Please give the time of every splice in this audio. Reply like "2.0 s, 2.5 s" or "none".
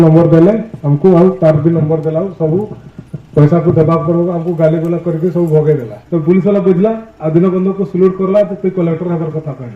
5.9 s